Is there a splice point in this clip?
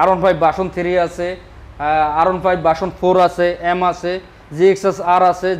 no; 0 cuts

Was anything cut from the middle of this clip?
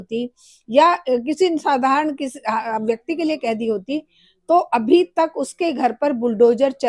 no; 0 cuts

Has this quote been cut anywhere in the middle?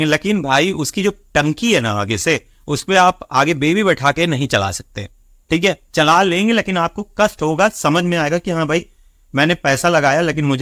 no; 0 cuts

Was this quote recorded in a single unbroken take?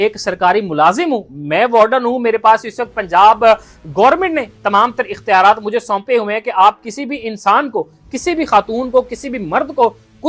yes; 0 cuts

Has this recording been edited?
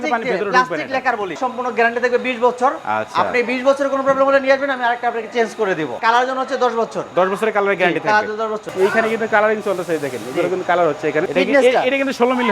yes; 4 cuts; at 1.4 s, 6.0 s, 8.7 s, 11.3 s

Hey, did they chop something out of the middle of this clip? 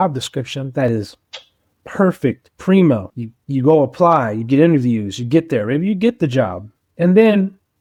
no; 0 cuts

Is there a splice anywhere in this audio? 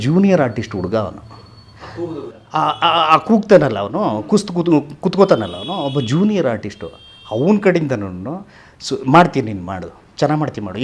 no; 0 cuts

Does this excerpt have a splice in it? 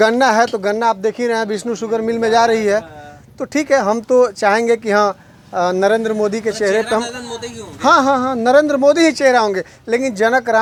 no; 0 cuts

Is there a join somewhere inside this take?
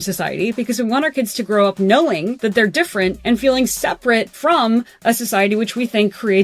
yes; 3 cuts; at 2.4 s, 3.2 s, 4.3 s

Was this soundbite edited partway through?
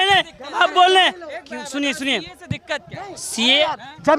no; 0 cuts

